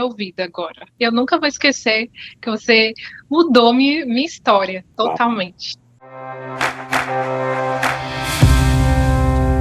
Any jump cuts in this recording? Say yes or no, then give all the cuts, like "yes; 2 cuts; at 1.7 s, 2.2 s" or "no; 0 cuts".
yes; 2 cuts; at 1.0 s, 4.9 s